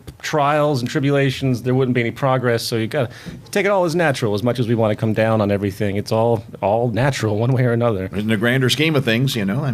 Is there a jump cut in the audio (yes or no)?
no